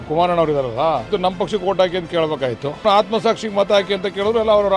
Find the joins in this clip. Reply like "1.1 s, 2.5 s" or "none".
1.1 s, 2.8 s